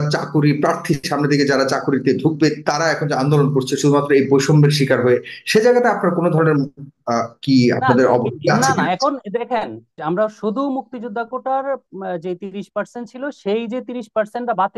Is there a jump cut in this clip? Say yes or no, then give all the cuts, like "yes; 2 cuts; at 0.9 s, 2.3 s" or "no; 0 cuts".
yes; 1 cut; at 9.9 s